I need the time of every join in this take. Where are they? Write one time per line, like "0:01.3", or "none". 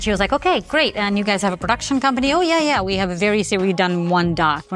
none